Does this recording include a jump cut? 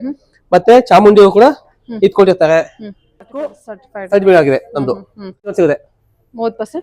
yes; 2 cuts; at 3.6 s, 5.5 s

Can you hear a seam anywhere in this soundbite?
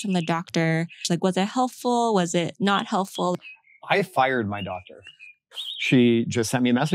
yes; 3 cuts; at 1.0 s, 3.3 s, 5.4 s

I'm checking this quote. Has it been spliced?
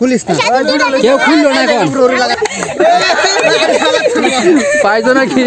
yes; 1 cut; at 2.4 s

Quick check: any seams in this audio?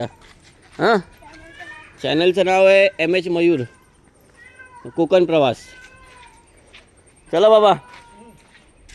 no; 0 cuts

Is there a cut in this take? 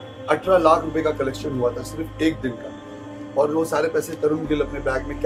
no; 0 cuts

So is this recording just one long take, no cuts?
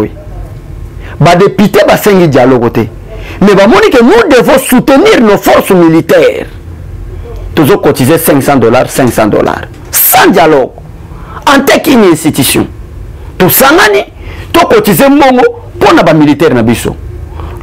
yes; 0 cuts

